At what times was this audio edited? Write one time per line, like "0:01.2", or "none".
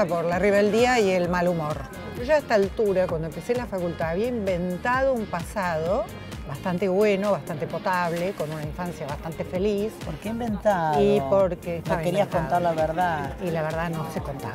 0:02.3